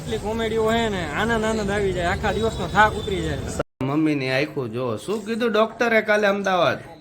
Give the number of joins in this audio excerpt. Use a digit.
1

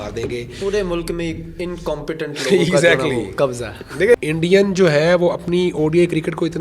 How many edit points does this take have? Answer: 1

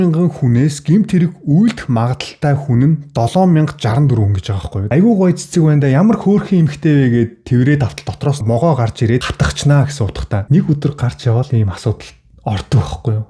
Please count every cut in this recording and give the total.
2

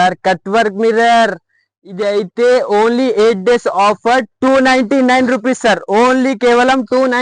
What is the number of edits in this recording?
0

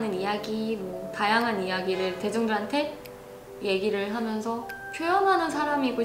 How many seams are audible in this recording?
1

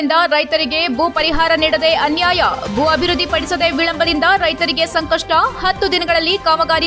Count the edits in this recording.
0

